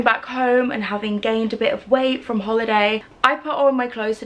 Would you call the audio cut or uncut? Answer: uncut